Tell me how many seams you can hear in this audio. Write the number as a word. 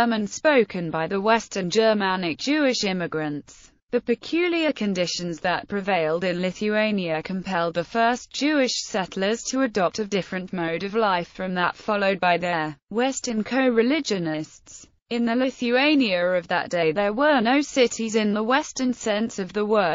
zero